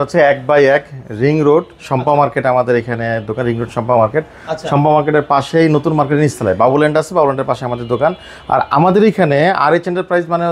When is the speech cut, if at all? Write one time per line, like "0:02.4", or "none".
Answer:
none

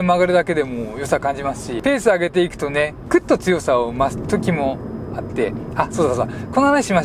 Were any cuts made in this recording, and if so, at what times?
0:01.7
0:03.0

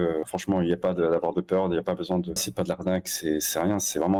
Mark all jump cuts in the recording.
none

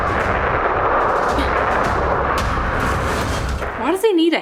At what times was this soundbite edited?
none

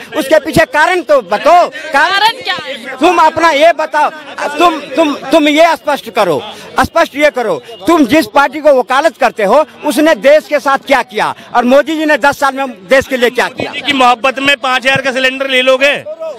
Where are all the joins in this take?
none

